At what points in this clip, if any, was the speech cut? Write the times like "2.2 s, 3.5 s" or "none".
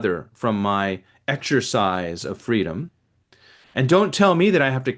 none

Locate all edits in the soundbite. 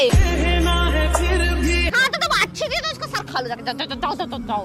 1.9 s

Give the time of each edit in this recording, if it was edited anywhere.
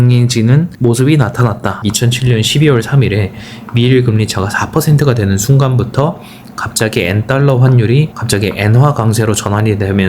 1.7 s

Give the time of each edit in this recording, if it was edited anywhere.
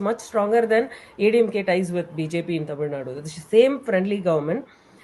none

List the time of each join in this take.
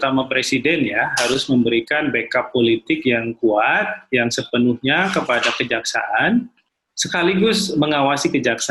none

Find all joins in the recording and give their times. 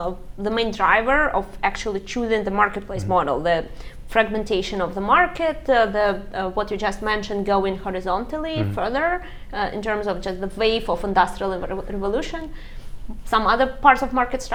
none

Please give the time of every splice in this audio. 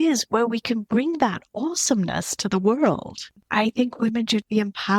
3.3 s

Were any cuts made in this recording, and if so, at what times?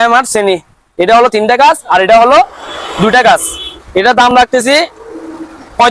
none

